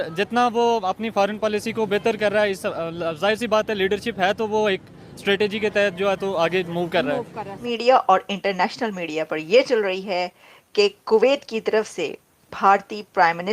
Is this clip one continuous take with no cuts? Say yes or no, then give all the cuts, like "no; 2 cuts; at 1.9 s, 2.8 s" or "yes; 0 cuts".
no; 1 cut; at 7.7 s